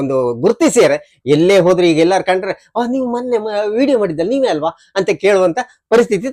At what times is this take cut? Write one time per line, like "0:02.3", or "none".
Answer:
none